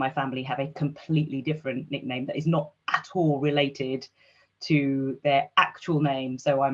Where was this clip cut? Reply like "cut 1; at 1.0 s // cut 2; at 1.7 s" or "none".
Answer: none